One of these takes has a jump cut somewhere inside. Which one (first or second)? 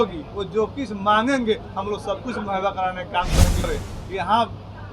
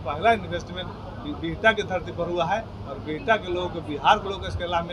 first